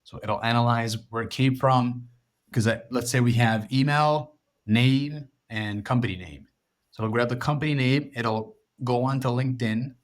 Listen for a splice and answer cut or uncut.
cut